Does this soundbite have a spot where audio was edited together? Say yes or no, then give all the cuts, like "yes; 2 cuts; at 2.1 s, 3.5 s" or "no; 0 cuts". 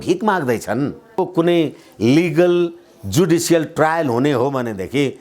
yes; 1 cut; at 1.3 s